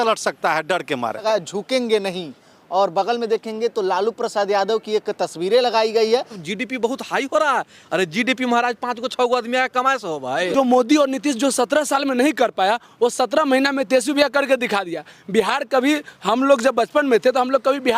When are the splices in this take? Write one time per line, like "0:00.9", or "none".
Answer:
0:01.2
0:06.4
0:10.5